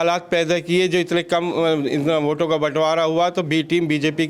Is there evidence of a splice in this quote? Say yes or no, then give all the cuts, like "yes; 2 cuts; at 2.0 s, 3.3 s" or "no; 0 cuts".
no; 0 cuts